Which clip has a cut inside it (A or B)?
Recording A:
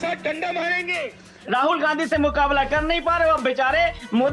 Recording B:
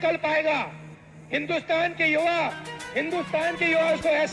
A